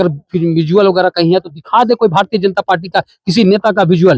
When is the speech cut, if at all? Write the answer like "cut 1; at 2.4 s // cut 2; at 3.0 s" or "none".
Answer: none

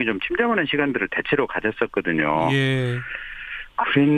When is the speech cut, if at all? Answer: cut 1; at 2.7 s

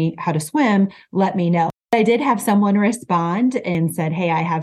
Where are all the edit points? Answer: cut 1; at 1.8 s // cut 2; at 3.8 s

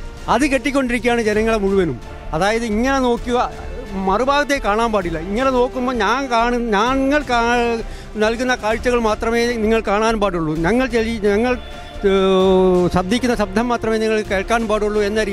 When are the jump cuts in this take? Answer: none

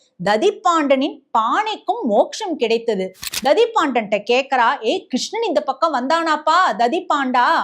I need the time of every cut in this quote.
cut 1; at 3.2 s

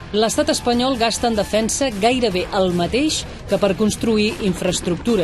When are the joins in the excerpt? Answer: cut 1; at 1.9 s

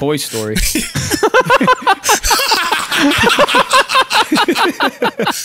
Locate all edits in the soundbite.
none

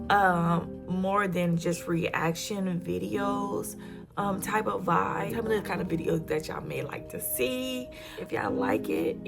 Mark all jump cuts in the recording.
cut 1; at 5.3 s // cut 2; at 8.1 s

